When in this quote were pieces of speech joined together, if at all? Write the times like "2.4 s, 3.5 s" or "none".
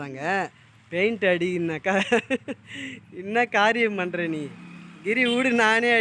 none